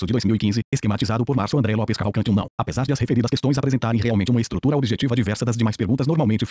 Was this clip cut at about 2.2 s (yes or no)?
yes